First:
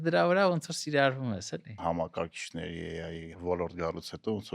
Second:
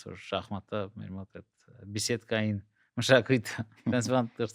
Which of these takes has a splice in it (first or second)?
first